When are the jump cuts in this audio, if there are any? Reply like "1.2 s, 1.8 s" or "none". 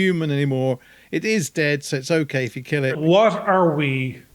3.0 s